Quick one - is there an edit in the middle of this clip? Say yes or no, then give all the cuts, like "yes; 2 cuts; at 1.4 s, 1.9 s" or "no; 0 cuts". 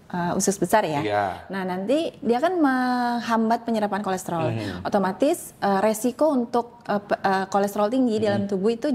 no; 0 cuts